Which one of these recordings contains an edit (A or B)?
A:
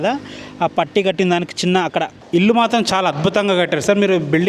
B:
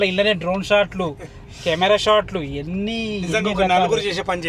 A